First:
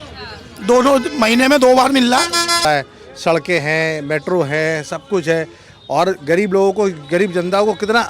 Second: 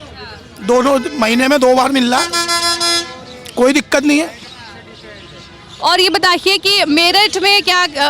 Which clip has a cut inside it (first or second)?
first